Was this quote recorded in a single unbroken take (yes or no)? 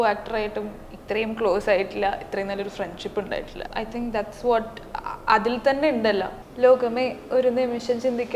no